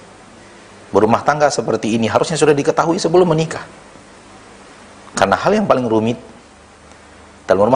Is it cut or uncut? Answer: uncut